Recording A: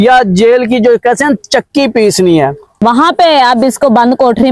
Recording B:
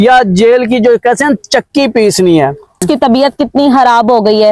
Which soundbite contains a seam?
B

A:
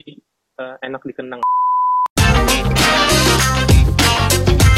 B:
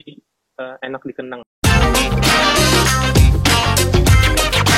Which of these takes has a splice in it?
B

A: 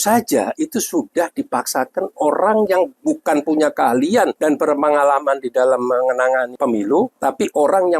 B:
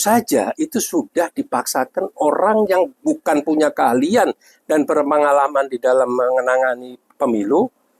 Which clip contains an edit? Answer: A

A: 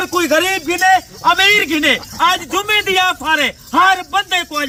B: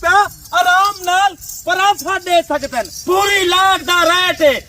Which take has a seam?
B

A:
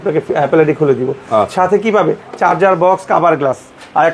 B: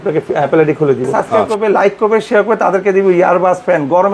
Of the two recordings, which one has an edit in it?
B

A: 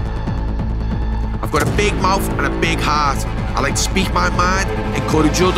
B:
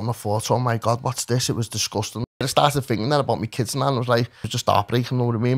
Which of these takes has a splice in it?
B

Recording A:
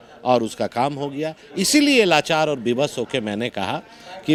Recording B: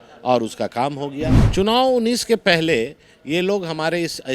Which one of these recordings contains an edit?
B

